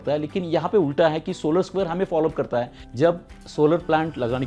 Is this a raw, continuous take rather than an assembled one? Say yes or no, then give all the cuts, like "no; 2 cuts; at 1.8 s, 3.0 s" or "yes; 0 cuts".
no; 1 cut; at 2.8 s